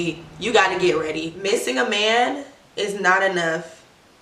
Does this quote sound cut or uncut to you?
cut